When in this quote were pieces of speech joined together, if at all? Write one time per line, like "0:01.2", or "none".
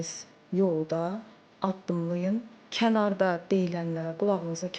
0:02.6